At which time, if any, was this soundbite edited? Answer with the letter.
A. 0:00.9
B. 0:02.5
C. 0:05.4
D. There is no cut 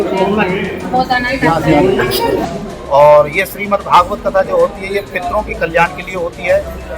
B